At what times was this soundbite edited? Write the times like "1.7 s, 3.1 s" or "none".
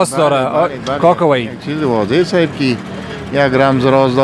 none